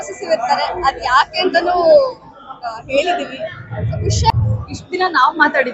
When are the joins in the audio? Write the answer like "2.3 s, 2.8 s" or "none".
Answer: 4.4 s